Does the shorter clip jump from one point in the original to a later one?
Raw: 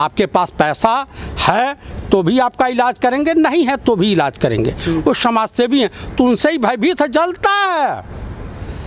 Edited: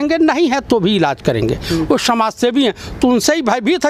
no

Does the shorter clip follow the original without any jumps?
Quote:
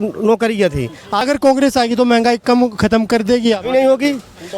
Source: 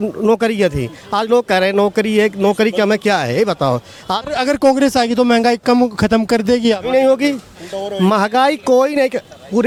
no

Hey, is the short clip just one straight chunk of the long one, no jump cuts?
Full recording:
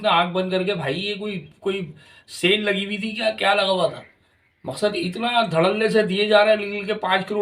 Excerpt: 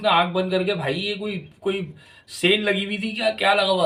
yes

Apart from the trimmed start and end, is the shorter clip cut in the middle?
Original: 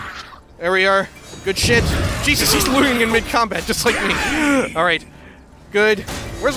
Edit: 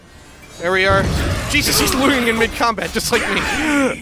yes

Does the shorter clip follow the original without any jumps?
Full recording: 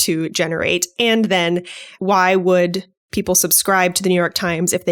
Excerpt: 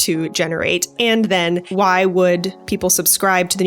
no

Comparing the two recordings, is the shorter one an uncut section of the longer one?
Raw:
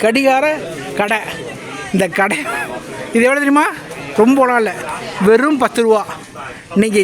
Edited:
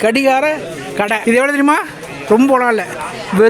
no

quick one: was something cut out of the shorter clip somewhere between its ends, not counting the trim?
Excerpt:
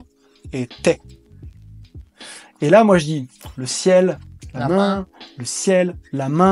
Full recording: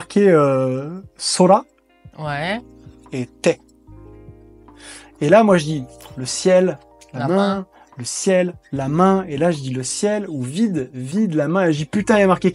no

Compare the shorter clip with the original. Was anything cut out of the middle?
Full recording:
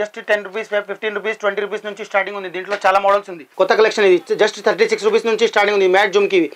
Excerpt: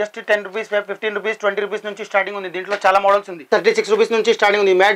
yes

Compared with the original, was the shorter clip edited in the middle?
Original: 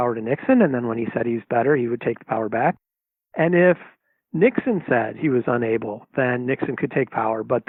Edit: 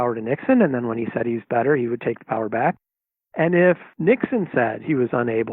yes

